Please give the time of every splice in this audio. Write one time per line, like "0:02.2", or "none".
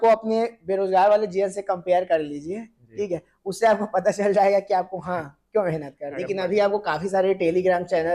0:06.1